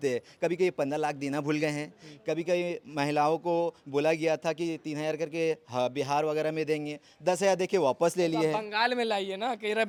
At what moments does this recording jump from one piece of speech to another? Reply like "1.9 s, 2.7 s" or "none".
none